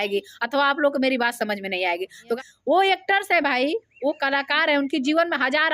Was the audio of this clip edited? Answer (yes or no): yes